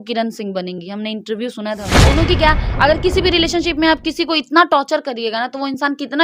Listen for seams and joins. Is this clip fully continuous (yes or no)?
no